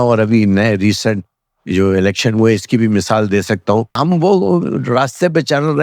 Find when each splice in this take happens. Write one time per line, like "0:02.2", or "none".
0:03.9